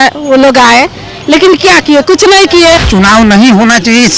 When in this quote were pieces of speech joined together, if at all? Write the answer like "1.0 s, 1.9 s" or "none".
2.8 s